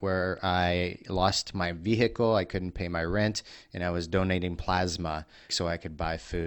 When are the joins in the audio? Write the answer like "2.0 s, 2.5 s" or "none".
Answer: 5.5 s